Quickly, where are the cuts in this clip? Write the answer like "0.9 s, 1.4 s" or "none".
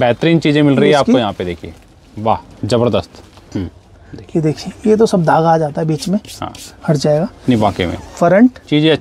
3.5 s

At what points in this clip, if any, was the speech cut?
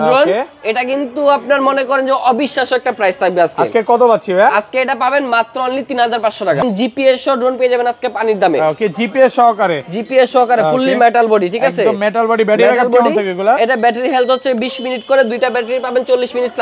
6.6 s

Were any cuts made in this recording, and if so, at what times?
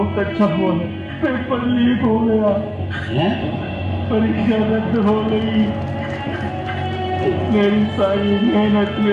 1.0 s

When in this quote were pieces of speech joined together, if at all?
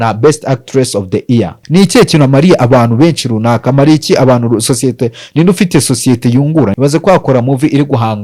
1.6 s, 6.7 s

